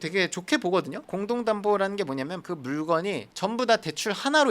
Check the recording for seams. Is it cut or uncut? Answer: cut